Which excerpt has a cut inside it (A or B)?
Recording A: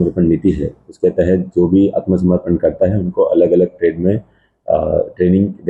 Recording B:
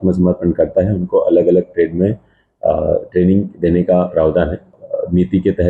B